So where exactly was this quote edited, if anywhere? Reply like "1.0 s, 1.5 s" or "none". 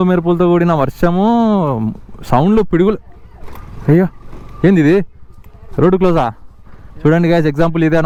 none